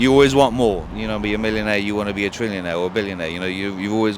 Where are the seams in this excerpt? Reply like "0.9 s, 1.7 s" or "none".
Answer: 0.9 s